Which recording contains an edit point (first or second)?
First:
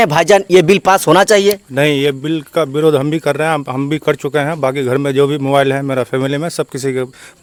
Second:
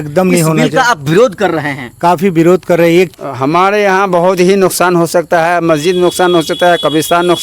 second